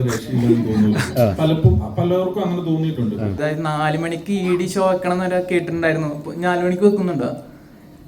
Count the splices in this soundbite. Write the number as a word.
one